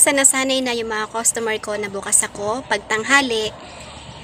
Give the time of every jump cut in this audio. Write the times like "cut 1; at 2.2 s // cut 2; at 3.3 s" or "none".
none